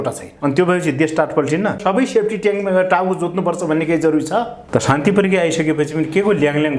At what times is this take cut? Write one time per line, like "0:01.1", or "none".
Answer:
0:01.8
0:04.6